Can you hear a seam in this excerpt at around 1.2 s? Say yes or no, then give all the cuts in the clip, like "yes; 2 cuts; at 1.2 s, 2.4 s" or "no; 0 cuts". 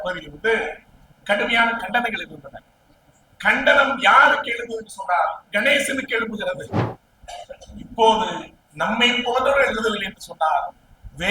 no; 1 cut; at 6.9 s